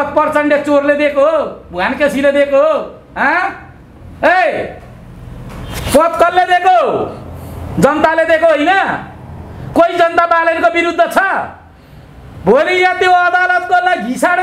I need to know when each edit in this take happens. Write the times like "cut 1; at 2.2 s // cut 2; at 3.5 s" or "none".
none